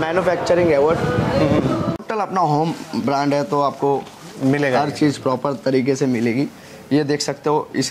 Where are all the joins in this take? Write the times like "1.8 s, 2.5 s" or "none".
2.0 s